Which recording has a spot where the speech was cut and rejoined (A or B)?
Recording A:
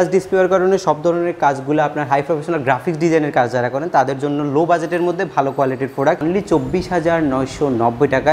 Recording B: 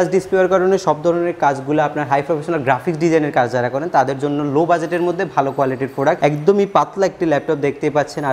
A